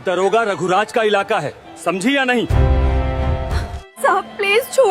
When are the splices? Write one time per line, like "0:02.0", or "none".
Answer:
none